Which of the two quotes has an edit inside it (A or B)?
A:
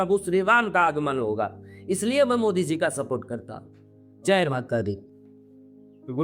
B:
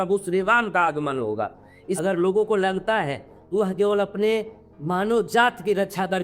B